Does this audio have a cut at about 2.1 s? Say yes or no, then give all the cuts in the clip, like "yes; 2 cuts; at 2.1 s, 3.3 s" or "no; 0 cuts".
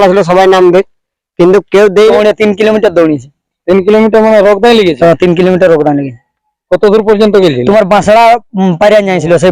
yes; 1 cut; at 2.1 s